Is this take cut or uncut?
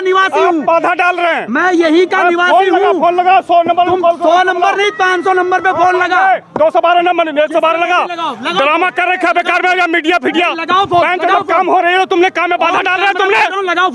uncut